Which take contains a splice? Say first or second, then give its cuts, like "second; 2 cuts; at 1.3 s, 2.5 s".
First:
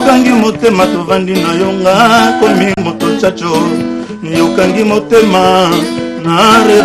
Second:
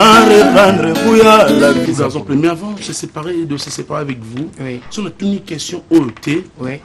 second; 1 cut; at 1.9 s